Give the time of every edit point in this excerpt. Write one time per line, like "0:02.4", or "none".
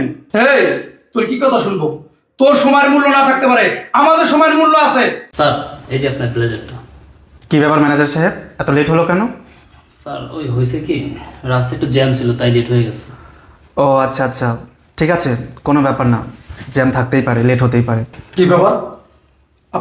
0:05.2